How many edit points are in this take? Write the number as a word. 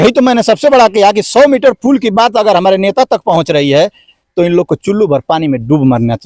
zero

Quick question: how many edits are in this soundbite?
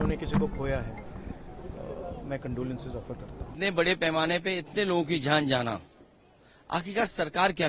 one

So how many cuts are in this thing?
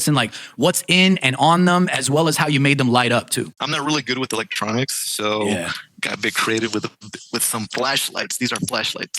one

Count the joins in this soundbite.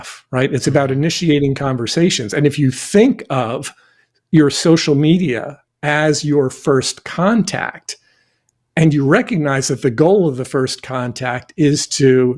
zero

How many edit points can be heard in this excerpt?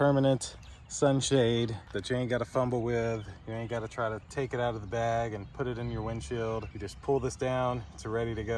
zero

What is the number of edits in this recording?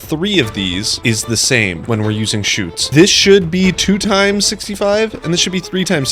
two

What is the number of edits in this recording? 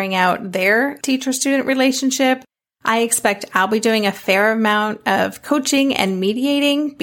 one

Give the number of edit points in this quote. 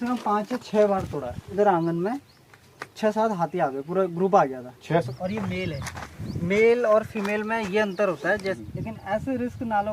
three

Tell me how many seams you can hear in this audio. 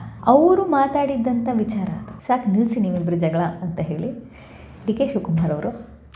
one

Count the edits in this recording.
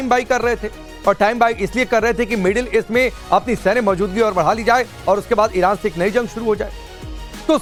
zero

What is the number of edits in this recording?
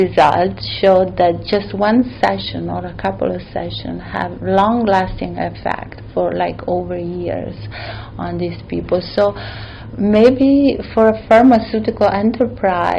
zero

